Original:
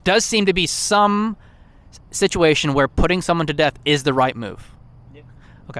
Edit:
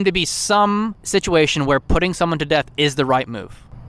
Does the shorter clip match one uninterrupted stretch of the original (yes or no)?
no